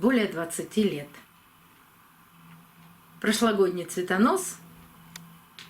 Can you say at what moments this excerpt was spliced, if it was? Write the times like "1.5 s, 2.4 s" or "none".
1.6 s